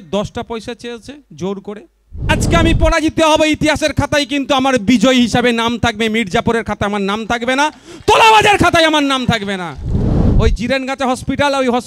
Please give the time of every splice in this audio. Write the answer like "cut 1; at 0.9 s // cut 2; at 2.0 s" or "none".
cut 1; at 2.3 s // cut 2; at 10.1 s